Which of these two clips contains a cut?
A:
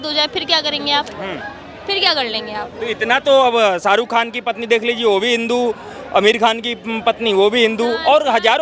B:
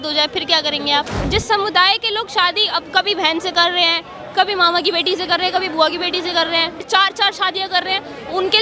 B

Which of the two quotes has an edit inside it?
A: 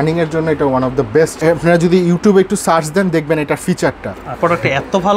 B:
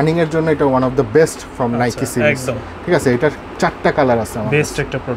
A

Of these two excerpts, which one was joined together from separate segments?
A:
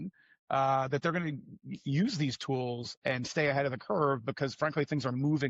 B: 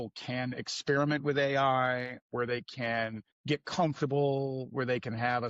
B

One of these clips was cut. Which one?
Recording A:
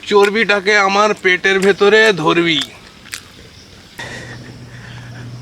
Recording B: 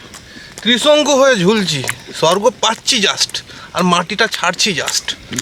A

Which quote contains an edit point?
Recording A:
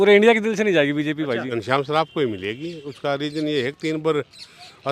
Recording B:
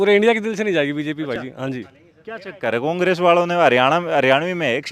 A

